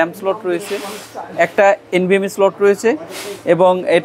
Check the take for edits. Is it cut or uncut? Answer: uncut